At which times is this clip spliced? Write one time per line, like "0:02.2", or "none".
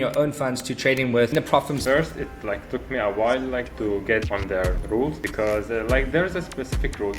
0:01.8